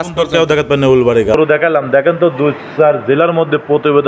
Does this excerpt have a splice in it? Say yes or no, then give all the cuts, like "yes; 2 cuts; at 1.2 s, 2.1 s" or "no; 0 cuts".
yes; 1 cut; at 1.4 s